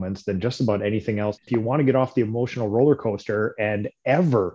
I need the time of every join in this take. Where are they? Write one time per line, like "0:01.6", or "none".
0:01.4